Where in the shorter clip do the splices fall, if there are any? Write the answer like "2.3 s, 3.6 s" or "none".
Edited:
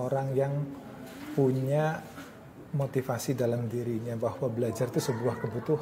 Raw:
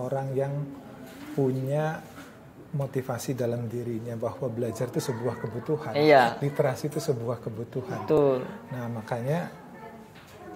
none